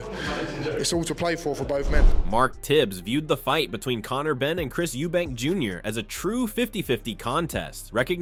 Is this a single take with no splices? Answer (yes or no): yes